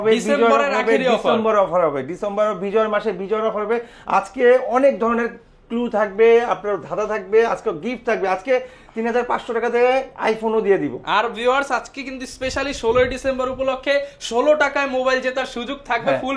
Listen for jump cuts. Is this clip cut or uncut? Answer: uncut